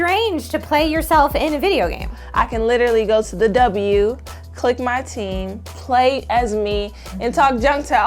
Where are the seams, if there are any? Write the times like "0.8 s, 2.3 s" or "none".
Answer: 2.2 s